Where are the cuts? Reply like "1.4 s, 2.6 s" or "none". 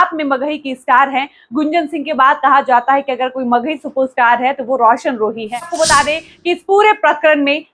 5.7 s